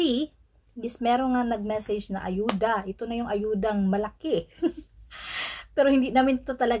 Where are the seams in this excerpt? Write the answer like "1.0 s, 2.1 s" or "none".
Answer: none